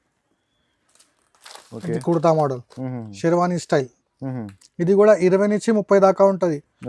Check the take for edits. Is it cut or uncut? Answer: uncut